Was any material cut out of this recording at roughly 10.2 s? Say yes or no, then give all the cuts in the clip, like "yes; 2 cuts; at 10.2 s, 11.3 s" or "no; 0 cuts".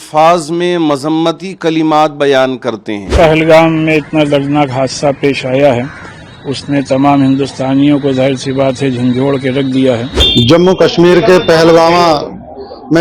yes; 2 cuts; at 3.1 s, 10.2 s